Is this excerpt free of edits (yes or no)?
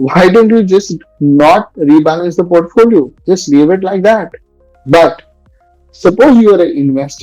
yes